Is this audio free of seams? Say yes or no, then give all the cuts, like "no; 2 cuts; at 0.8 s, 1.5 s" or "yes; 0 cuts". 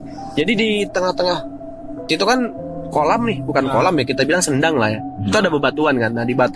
yes; 0 cuts